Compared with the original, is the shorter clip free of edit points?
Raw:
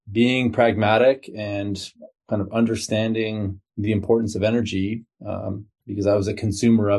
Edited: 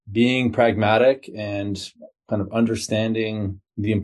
yes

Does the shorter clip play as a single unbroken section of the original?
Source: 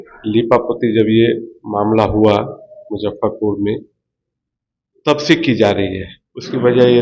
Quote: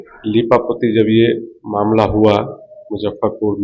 yes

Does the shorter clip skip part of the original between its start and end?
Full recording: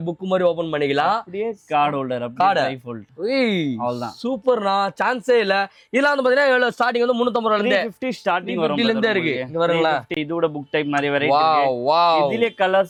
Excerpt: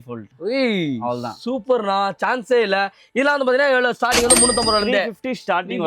no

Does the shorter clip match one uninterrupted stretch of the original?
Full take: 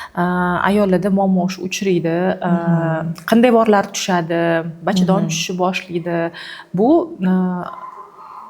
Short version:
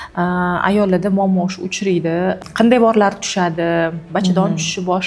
no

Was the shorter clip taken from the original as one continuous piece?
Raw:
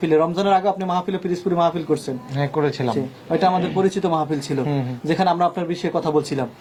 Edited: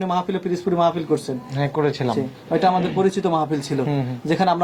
yes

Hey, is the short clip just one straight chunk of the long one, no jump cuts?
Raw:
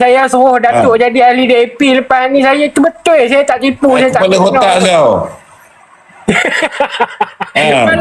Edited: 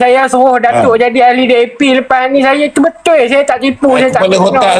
yes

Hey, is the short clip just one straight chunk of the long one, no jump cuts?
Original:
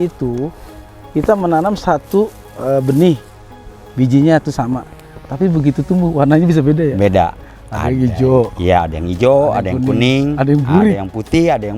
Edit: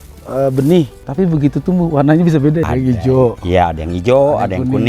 no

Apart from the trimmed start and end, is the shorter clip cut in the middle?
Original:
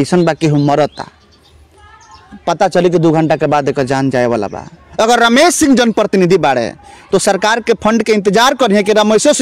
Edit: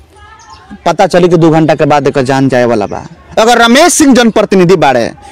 no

